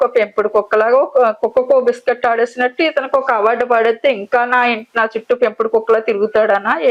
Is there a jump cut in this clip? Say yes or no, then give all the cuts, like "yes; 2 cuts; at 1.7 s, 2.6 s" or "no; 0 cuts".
no; 0 cuts